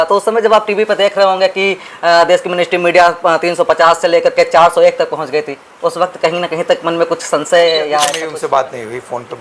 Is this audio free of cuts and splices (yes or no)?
no